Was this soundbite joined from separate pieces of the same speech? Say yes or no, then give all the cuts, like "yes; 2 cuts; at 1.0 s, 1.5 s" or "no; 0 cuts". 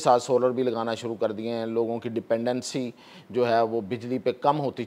no; 0 cuts